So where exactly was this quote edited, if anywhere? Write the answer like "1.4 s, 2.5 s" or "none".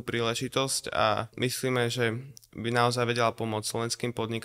1.3 s

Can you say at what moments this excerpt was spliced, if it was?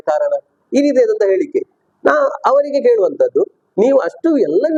none

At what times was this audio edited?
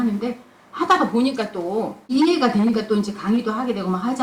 2.1 s

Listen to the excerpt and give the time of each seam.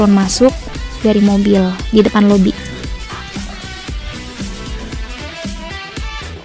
2.6 s

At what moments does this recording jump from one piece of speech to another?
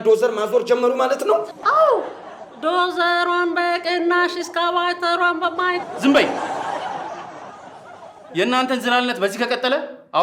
1.6 s

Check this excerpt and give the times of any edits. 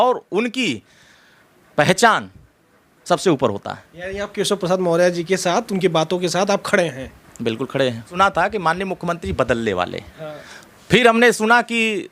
8.1 s

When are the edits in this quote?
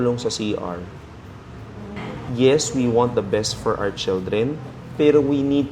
2.1 s

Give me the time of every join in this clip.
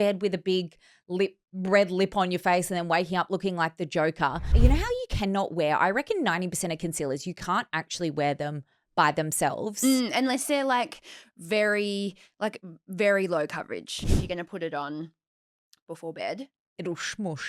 4.5 s, 14.0 s

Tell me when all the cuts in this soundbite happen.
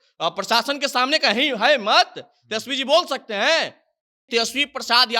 4.2 s

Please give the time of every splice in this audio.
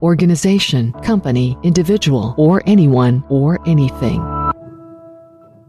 none

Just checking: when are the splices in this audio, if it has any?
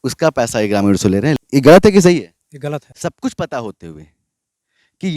1.4 s, 2.9 s

